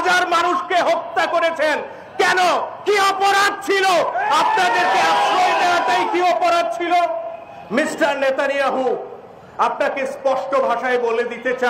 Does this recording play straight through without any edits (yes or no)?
yes